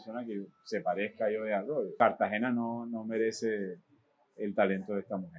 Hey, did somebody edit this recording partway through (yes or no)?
yes